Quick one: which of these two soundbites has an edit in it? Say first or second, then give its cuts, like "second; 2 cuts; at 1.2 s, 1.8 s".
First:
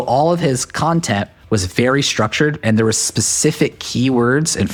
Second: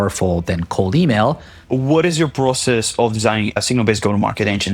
second; 2 cuts; at 1.6 s, 3.6 s